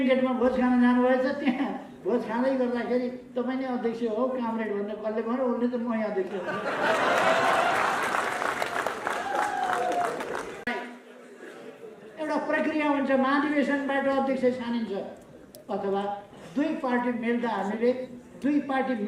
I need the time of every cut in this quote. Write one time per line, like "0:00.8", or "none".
none